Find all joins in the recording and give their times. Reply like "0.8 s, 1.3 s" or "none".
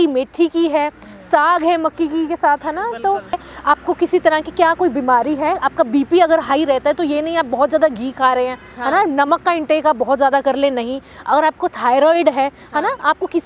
3.4 s